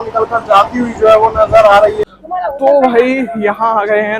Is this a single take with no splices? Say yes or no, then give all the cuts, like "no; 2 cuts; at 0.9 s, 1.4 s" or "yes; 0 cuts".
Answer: no; 1 cut; at 2.0 s